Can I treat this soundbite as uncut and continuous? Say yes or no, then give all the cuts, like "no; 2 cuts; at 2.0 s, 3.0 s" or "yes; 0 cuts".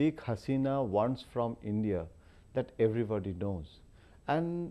no; 1 cut; at 2.9 s